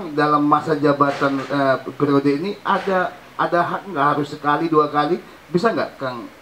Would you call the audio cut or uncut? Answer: uncut